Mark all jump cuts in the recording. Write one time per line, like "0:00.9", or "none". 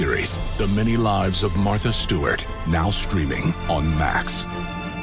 none